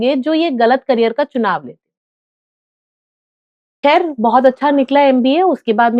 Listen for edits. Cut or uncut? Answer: uncut